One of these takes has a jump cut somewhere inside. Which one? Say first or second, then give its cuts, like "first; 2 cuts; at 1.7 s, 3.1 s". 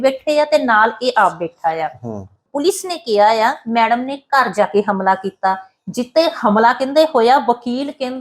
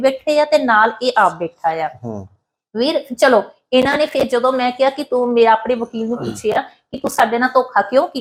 first; 1 cut; at 2.5 s